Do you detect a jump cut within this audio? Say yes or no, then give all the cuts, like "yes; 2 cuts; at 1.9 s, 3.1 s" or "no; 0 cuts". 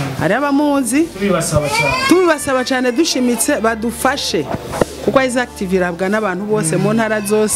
no; 0 cuts